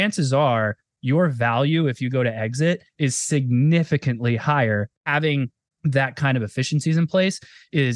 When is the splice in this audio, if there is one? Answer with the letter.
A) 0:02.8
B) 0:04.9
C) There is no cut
B